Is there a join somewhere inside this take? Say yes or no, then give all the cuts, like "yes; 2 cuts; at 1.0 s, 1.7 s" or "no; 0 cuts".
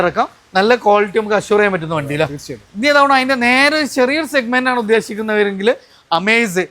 no; 0 cuts